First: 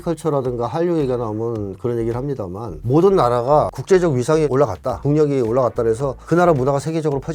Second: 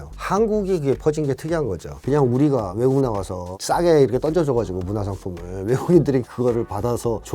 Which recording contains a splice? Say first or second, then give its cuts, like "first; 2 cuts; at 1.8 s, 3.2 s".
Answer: second; 1 cut; at 2.0 s